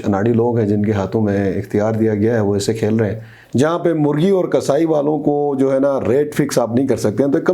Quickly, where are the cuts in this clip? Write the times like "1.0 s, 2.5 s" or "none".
3.3 s